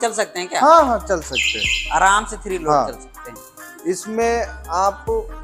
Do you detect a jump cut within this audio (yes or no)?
no